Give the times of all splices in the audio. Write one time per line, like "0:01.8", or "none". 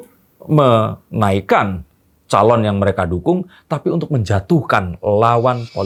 none